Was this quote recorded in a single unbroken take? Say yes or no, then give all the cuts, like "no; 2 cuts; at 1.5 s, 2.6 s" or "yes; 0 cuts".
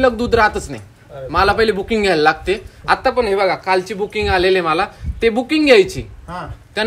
yes; 0 cuts